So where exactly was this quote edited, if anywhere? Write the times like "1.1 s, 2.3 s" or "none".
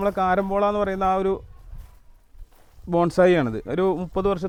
none